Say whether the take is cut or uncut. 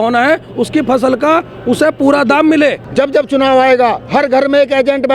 cut